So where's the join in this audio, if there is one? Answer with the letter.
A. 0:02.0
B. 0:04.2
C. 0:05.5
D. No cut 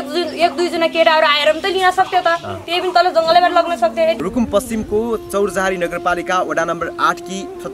B